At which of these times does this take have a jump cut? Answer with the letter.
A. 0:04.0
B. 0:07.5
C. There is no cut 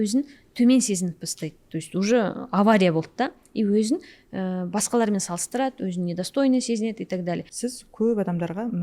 B